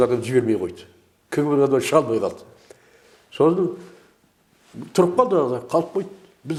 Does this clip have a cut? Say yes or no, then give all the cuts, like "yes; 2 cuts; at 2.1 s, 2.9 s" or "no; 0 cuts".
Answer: no; 0 cuts